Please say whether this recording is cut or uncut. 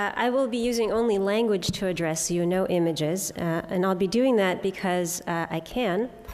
cut